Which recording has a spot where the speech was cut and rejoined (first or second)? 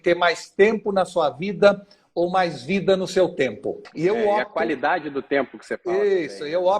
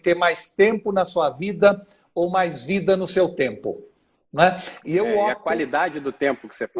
first